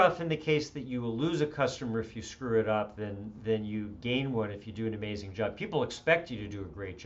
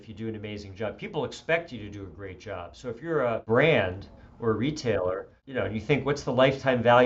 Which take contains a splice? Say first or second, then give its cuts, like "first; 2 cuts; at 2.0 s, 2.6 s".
second; 2 cuts; at 3.4 s, 5.4 s